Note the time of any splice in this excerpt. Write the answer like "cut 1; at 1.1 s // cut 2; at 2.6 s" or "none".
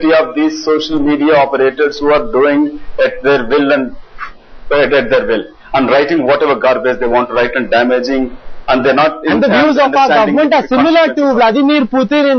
cut 1; at 2.5 s

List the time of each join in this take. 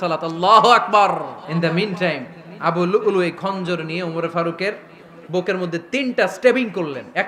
cut 1; at 1.4 s

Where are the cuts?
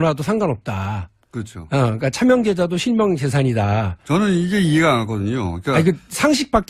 cut 1; at 5.3 s

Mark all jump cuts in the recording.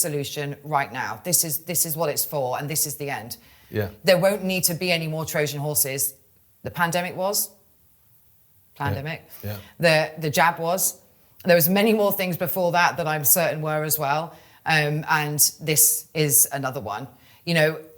none

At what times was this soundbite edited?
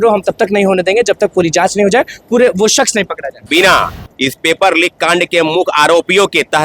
cut 1; at 3.5 s

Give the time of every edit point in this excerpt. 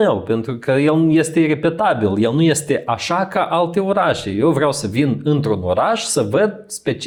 none

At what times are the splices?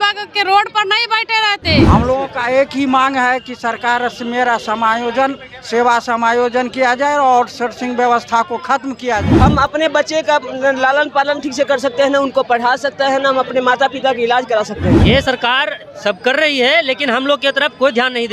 cut 1; at 1.8 s // cut 2; at 9.3 s // cut 3; at 15.0 s

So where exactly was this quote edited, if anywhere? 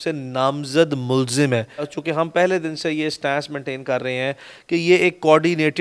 cut 1; at 1.9 s

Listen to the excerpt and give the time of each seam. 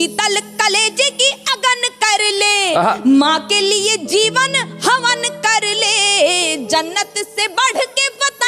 none

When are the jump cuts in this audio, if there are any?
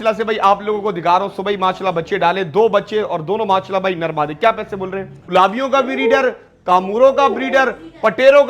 cut 1; at 5.3 s

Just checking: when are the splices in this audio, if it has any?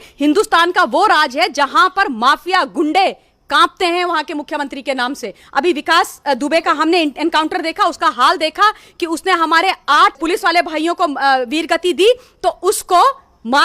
cut 1; at 10.2 s

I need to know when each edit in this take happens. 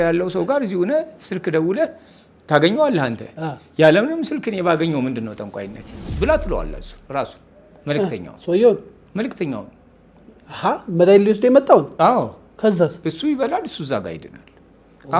cut 1; at 6.0 s

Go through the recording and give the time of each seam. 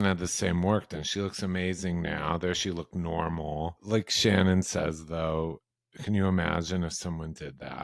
cut 1; at 3.8 s

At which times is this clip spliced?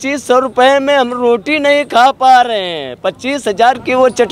none

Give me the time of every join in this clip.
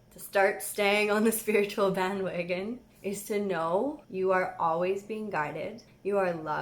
cut 1; at 2.9 s // cut 2; at 4.0 s

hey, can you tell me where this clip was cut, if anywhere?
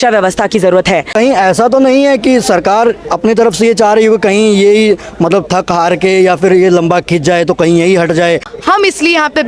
cut 1; at 1.1 s // cut 2; at 8.5 s

